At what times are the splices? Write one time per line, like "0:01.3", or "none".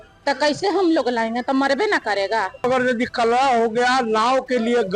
0:02.6